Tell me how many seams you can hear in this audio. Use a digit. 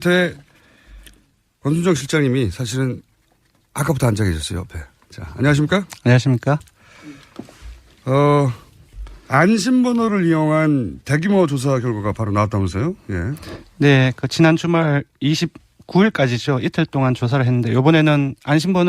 1